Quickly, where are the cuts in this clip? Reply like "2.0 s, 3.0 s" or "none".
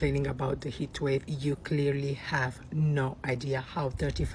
none